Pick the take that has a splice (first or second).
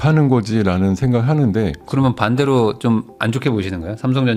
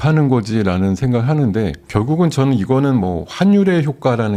first